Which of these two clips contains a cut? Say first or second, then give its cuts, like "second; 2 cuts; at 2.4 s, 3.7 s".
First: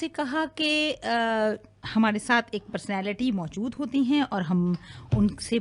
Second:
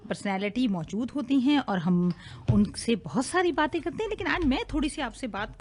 first; 1 cut; at 1.2 s